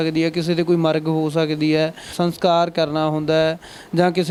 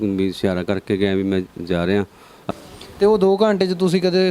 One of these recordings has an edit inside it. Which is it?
second; 1 cut; at 2.5 s

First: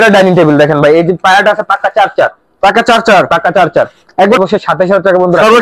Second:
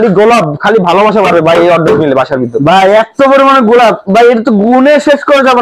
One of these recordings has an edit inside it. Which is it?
first; 1 cut; at 4.4 s

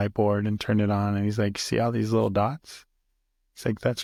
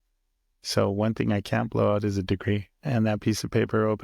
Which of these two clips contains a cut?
second; 1 cut; at 2.8 s

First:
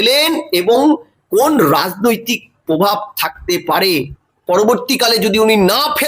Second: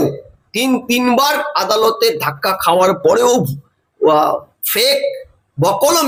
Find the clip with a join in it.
first; 1 cut; at 3.9 s

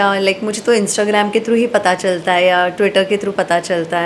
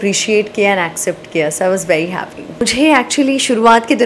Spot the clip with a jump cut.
second; 1 cut; at 2.6 s

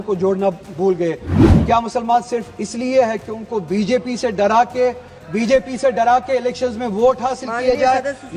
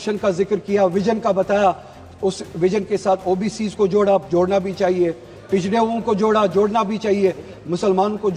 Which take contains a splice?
first; 1 cut; at 1.3 s

